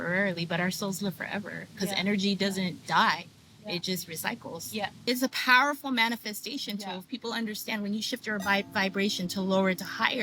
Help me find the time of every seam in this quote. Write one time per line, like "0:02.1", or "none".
0:05.1